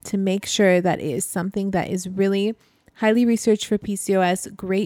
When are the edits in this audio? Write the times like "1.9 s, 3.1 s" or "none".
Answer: none

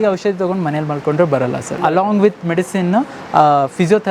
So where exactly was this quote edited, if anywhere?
1.9 s

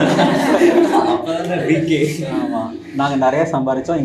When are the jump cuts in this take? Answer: none

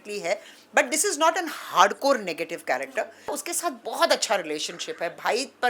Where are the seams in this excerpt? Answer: 3.3 s

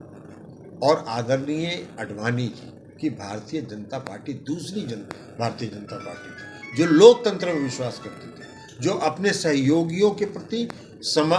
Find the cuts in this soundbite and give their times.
none

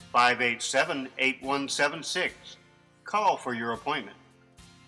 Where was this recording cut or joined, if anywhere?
none

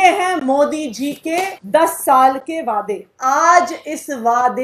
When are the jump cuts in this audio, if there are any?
1.5 s, 3.0 s

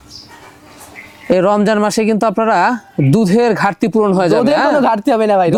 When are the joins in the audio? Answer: none

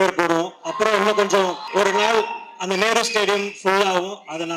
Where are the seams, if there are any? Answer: 1.6 s

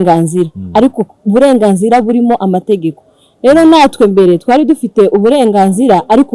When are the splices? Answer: none

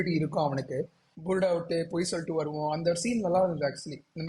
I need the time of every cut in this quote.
1.1 s

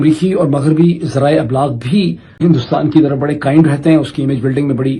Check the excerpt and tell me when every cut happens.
2.4 s

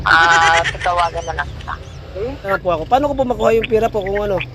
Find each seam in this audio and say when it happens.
2.6 s

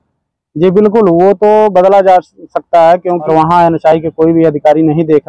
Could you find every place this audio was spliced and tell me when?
2.8 s

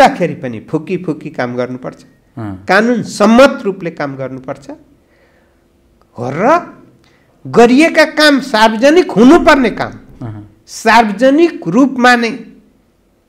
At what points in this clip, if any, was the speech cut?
none

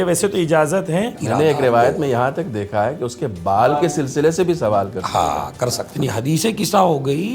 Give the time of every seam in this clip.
1.2 s, 5.9 s

